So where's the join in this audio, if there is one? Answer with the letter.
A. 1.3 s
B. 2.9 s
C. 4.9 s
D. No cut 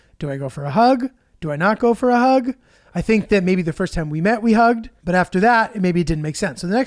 C